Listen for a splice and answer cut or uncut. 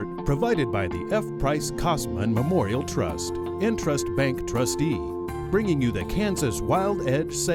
uncut